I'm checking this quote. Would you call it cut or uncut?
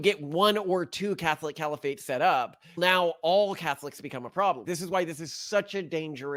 uncut